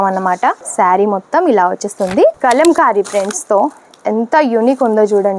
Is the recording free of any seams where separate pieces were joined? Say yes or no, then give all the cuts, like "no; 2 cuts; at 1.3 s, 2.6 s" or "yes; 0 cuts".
no; 1 cut; at 2.3 s